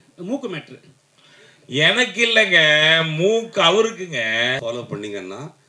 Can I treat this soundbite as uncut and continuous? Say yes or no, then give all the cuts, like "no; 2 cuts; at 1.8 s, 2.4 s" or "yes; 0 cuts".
no; 1 cut; at 4.6 s